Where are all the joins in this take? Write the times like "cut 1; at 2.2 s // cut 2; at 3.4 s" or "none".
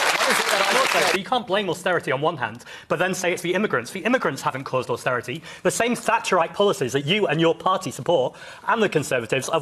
cut 1; at 1.1 s

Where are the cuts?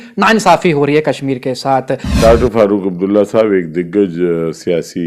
cut 1; at 2.1 s

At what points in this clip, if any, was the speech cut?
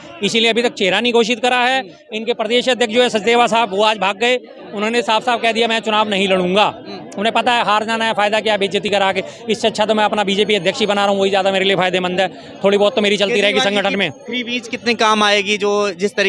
none

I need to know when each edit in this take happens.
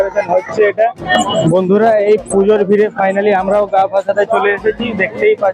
cut 1; at 1.1 s

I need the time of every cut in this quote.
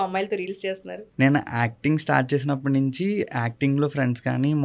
cut 1; at 1.0 s

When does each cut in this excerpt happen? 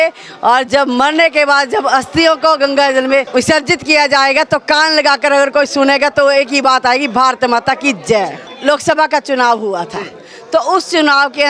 cut 1; at 3.3 s // cut 2; at 8.4 s

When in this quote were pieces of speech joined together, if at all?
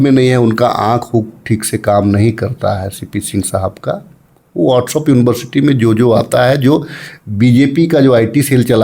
none

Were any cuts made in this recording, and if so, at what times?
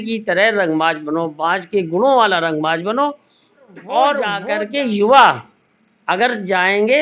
cut 1; at 4.4 s

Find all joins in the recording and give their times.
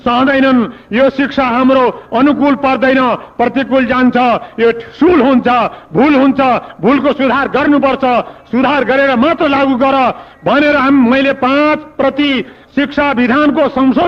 none

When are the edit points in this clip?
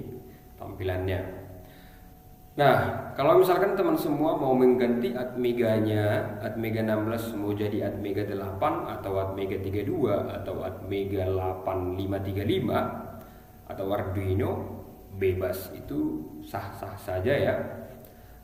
none

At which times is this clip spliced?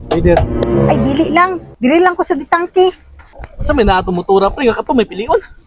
cut 1; at 3.1 s

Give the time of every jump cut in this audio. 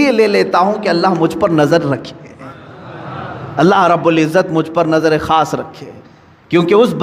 none

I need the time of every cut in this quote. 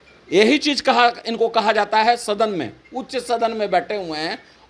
none

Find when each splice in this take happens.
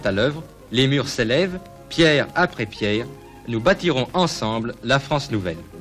cut 1; at 3.4 s

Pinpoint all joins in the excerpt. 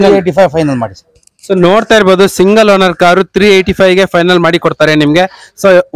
none

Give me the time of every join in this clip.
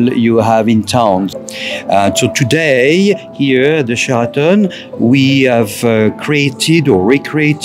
cut 1; at 1.3 s

